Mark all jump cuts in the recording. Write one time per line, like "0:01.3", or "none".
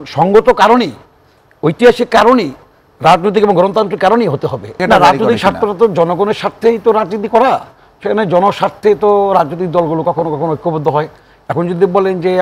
0:04.8